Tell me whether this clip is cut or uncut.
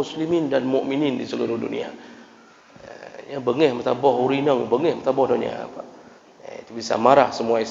uncut